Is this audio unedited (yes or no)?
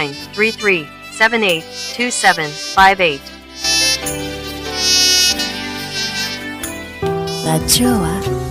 yes